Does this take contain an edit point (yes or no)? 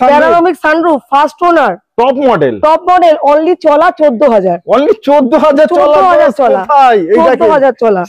no